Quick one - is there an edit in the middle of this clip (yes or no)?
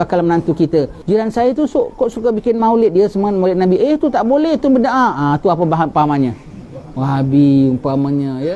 yes